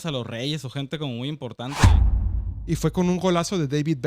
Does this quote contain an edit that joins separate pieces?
yes; 1 cut; at 2.1 s

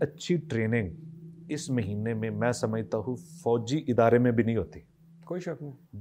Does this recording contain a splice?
no; 0 cuts

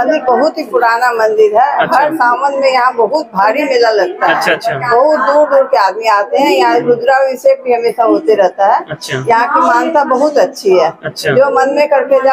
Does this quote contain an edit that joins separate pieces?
no; 0 cuts

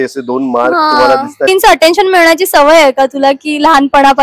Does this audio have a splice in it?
yes; 1 cut; at 1.5 s

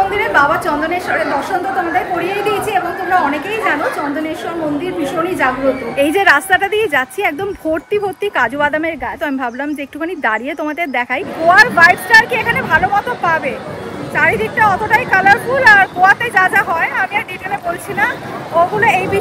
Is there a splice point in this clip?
yes; 3 cuts; at 5.9 s, 9.1 s, 11.3 s

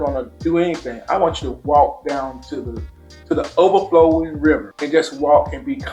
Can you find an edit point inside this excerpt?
no; 0 cuts

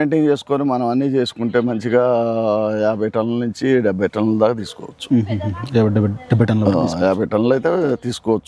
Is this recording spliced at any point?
no; 0 cuts

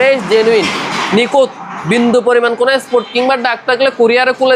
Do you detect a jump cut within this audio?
no; 0 cuts

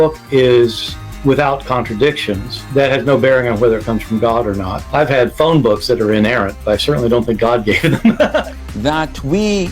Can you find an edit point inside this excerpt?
yes; 1 cut; at 8.4 s

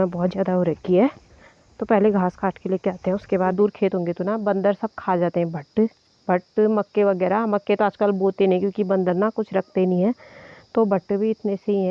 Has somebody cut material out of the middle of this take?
yes; 1 cut; at 3.5 s

